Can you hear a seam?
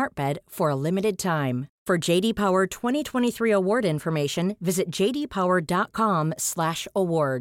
no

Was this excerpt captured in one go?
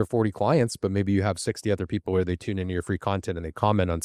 yes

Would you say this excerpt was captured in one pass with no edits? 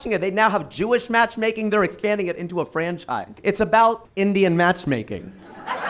no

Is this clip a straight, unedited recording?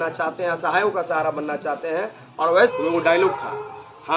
no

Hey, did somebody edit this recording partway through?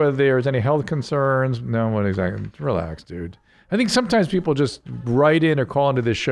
no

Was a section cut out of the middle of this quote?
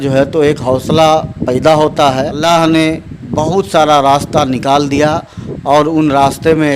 yes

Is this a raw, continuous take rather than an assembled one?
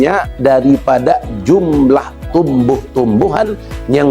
yes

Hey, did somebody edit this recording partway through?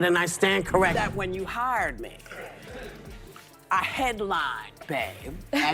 yes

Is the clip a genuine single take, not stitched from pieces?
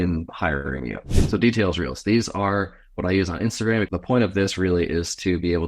no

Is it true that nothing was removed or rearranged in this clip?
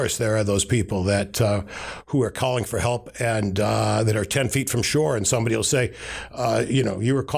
yes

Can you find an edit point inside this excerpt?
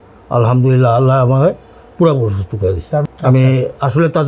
yes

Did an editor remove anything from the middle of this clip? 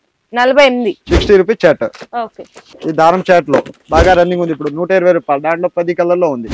yes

